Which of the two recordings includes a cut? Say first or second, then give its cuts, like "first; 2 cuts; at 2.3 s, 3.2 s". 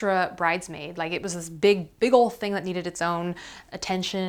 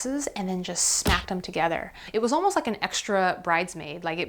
second; 1 cut; at 2.0 s